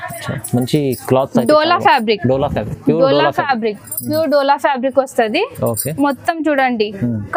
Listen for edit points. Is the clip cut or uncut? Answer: uncut